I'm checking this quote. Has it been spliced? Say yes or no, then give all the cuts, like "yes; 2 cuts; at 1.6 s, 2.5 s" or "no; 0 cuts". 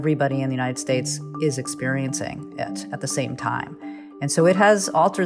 no; 0 cuts